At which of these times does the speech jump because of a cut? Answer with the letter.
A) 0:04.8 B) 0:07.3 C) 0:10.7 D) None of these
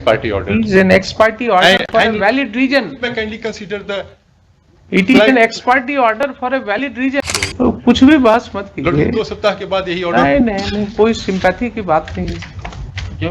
B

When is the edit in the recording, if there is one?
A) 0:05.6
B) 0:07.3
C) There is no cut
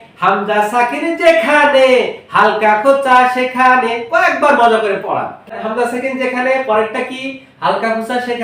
A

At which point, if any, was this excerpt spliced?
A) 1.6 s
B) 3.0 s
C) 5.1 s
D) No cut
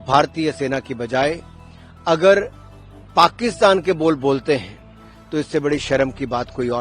C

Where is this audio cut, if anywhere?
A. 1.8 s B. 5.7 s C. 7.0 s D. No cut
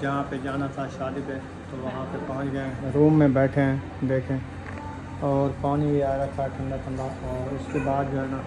D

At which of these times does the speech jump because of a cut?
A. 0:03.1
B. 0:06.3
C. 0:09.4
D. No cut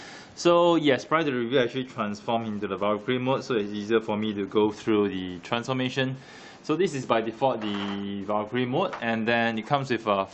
A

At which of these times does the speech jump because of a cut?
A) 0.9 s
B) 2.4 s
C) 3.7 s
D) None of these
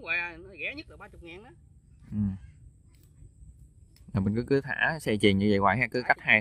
D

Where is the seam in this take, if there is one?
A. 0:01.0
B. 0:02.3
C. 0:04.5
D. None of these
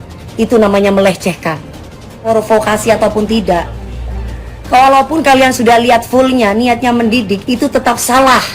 B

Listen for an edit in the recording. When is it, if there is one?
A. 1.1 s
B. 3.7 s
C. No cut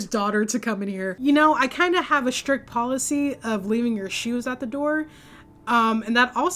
A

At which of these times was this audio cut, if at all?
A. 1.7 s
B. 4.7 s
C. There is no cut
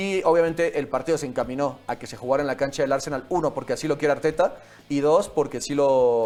C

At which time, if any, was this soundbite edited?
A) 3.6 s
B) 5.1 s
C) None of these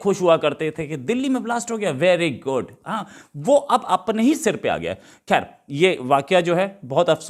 C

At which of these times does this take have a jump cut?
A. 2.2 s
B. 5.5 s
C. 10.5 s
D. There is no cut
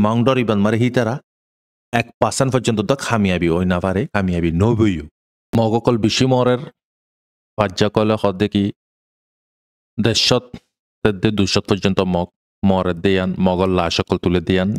B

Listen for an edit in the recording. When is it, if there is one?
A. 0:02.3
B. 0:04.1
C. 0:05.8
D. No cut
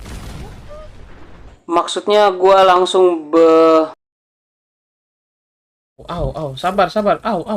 D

